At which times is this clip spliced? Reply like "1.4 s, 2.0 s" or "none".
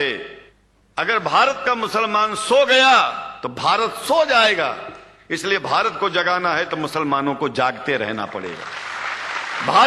none